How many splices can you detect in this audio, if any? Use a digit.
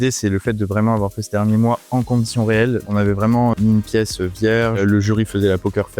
1